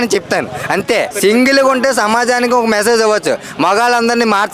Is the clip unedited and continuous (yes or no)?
no